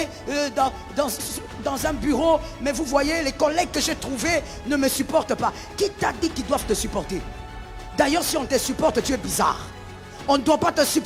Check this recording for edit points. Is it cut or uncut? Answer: uncut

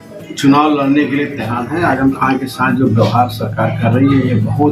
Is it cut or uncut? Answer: cut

